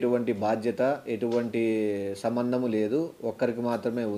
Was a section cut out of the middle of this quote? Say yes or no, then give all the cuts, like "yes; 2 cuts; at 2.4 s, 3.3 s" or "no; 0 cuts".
no; 0 cuts